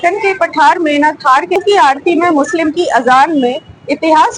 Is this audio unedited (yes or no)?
no